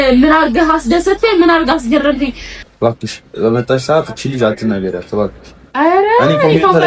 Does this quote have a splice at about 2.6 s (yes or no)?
yes